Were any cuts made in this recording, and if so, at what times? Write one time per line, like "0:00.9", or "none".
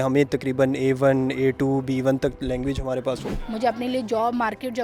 0:03.3